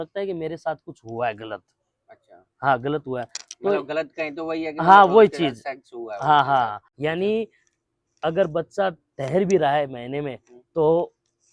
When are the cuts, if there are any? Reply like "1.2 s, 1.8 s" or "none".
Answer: 6.8 s